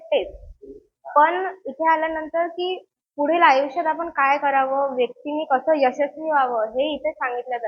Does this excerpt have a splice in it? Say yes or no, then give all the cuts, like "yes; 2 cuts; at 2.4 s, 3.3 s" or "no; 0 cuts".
no; 0 cuts